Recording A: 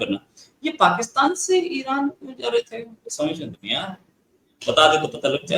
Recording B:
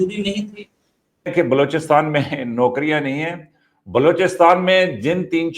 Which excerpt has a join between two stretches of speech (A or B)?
B